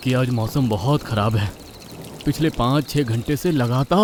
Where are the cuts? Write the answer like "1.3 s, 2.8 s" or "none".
none